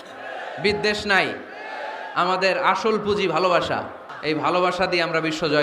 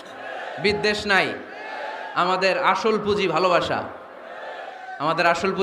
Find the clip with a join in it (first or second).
first